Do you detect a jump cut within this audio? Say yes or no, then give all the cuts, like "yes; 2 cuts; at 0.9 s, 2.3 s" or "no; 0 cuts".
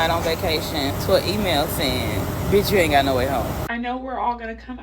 yes; 3 cuts; at 0.9 s, 2.3 s, 3.6 s